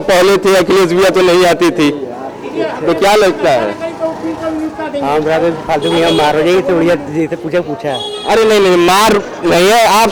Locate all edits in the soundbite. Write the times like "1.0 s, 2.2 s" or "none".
none